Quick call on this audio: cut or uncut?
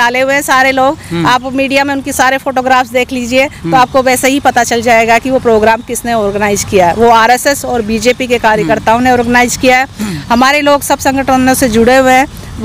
uncut